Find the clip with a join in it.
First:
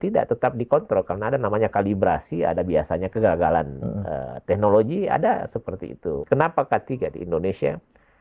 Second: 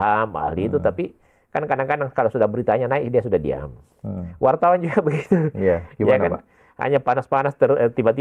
first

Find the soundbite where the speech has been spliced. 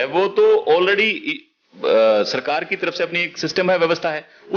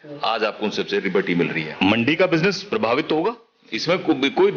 second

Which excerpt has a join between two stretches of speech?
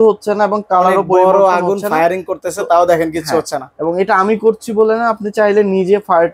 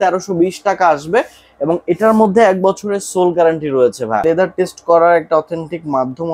second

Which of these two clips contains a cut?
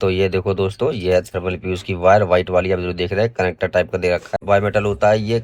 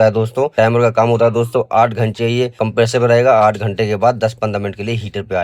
first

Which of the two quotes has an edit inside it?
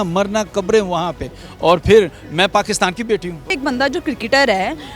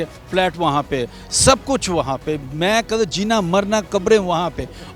first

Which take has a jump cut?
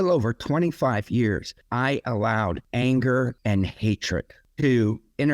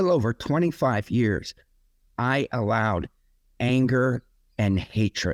first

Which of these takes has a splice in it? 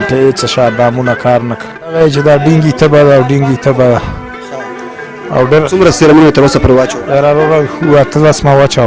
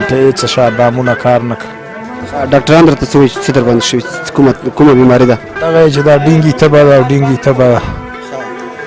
first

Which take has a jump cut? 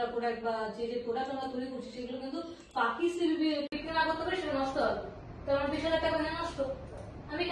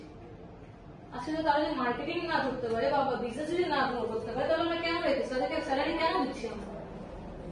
first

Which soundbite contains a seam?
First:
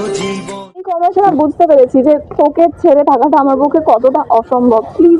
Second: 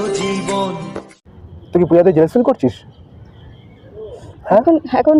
first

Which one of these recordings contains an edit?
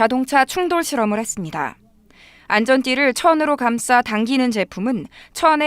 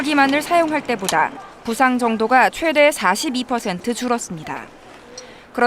first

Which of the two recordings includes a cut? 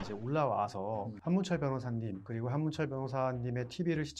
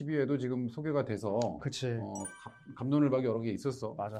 first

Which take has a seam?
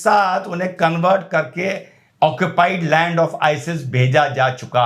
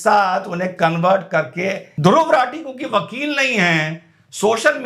second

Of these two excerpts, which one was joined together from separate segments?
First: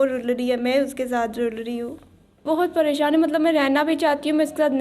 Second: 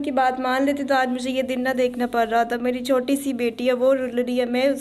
first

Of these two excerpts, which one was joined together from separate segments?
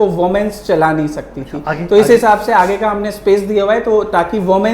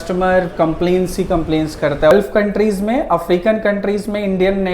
second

